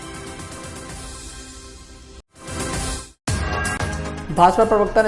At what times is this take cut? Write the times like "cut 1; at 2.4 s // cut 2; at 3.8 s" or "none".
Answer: none